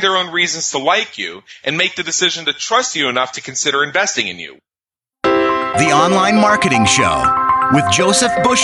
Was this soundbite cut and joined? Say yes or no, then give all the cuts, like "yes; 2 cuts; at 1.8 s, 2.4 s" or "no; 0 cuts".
yes; 1 cut; at 4.8 s